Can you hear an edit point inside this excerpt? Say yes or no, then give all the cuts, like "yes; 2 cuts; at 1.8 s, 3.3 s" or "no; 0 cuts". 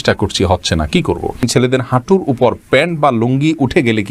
yes; 1 cut; at 1.4 s